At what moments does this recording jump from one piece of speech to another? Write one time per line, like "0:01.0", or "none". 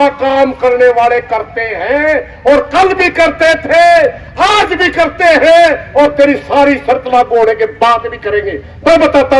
none